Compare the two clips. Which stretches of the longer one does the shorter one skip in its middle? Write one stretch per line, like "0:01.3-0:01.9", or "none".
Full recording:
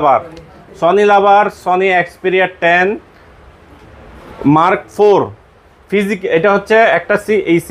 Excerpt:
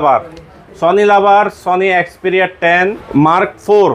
0:03.0-0:04.3